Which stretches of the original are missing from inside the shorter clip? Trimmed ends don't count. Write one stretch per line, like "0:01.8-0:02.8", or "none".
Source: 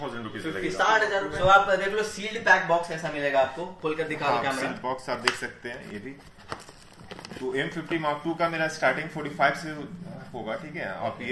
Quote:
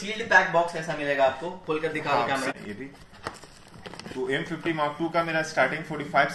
0:04.7-0:05.8